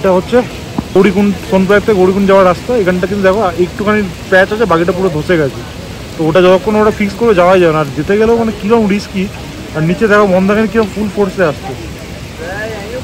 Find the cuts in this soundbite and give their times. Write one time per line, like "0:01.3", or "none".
0:01.0